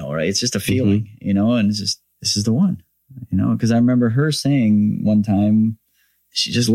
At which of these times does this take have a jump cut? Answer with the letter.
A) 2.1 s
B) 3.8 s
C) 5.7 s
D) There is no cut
D